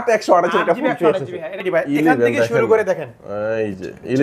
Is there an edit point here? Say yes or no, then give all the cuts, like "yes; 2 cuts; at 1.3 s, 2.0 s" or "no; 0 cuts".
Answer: yes; 1 cut; at 1.6 s